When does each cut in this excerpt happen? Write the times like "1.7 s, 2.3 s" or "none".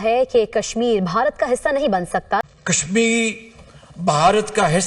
2.5 s